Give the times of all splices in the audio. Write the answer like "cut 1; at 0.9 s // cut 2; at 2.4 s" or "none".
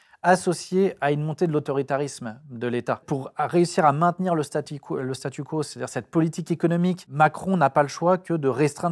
cut 1; at 3.0 s // cut 2; at 7.1 s